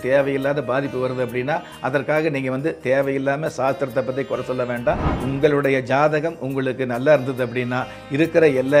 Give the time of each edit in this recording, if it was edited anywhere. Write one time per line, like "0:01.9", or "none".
0:05.1

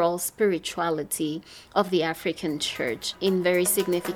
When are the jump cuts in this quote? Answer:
0:03.1

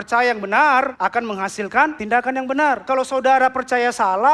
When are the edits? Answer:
0:00.9
0:02.0
0:02.8

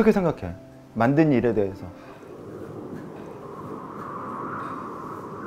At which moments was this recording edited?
0:02.3
0:04.1

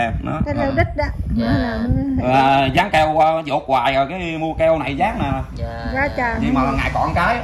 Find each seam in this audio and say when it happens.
none

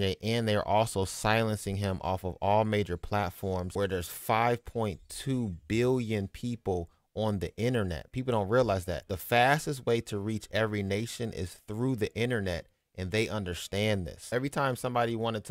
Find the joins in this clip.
0:03.7
0:09.1
0:14.2

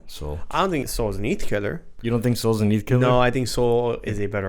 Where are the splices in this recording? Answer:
0:00.8
0:01.9

